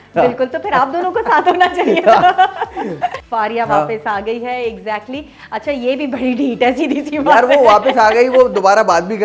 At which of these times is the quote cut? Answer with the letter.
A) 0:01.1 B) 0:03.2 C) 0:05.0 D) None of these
B